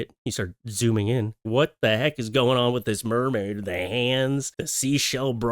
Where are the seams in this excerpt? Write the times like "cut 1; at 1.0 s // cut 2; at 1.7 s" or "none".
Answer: cut 1; at 1.5 s